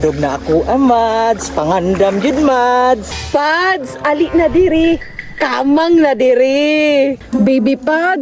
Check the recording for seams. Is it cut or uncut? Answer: cut